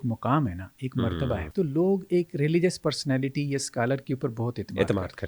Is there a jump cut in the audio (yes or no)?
yes